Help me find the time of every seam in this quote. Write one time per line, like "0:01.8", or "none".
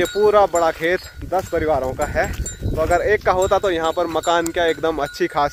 none